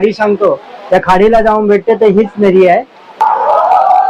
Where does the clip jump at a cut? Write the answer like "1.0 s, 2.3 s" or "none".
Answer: 3.2 s